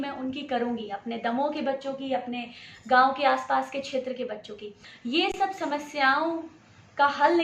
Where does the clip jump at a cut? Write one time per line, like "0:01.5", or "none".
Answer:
0:05.2